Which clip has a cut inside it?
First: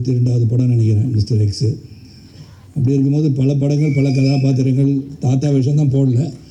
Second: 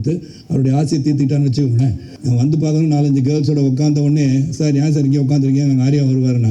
second; 1 cut; at 2.1 s

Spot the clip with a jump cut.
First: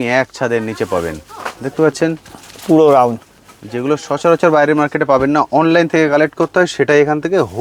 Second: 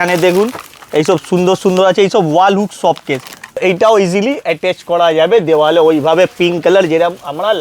second; 1 cut; at 3.6 s

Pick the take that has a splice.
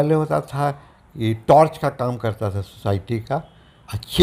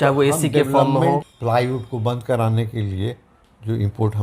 second; 1 cut; at 1.3 s

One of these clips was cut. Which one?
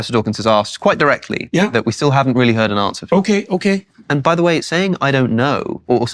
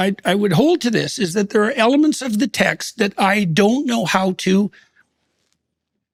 first; 1 cut; at 4.0 s

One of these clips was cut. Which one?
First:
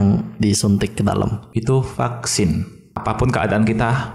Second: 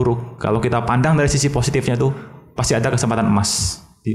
first; 2 cuts; at 1.4 s, 2.8 s

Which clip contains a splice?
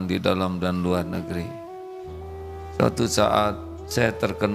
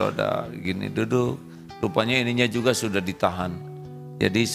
first; 2 cuts; at 1.5 s, 2.8 s

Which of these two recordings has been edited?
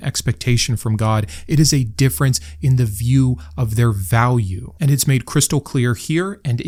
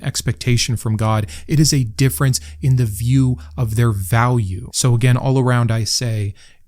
second; 1 cut; at 4.6 s

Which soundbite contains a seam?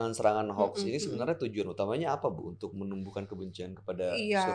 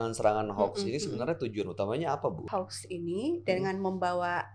second; 1 cut; at 2.5 s

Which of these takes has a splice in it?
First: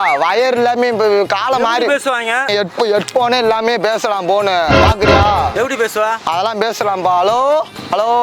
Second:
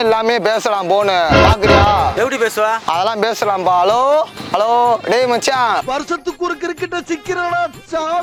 first; 1 cut; at 2.5 s

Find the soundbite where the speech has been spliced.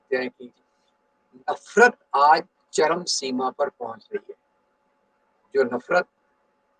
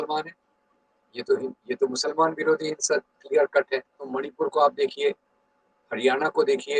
second; 1 cut; at 4.2 s

